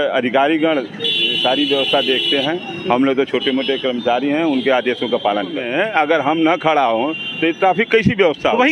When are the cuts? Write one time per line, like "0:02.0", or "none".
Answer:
0:05.6